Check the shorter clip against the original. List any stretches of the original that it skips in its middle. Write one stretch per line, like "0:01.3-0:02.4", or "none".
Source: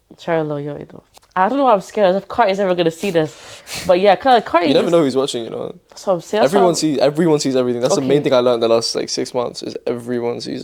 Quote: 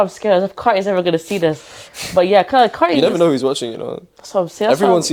none